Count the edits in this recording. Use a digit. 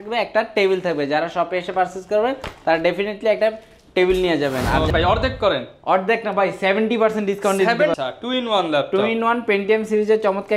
2